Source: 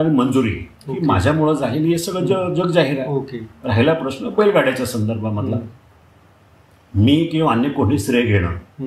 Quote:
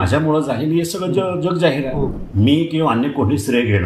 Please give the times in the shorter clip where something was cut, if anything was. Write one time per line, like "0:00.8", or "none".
0:02.2